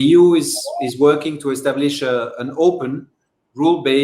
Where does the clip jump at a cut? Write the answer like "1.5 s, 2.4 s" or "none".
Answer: none